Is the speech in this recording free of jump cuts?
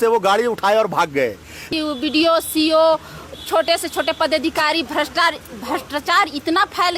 no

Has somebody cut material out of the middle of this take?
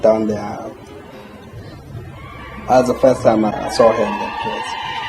yes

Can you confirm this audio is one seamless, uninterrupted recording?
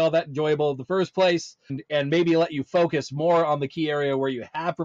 yes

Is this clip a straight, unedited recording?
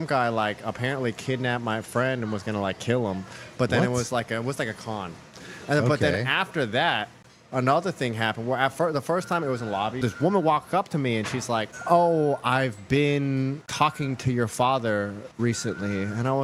yes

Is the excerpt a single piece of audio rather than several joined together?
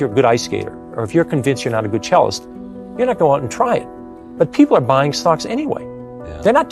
yes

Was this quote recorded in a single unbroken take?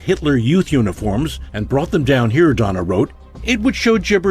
yes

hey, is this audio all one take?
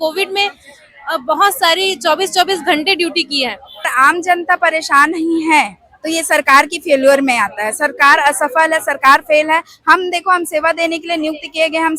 no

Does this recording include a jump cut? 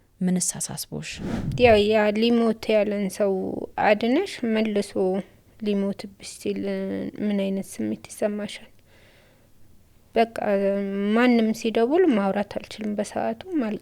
yes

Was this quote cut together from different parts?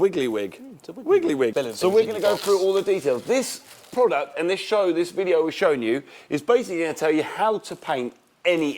yes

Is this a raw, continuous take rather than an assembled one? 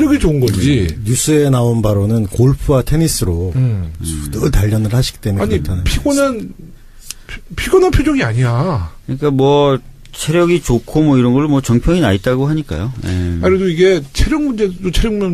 no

